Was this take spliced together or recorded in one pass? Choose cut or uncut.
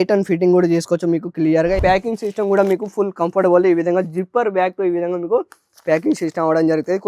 cut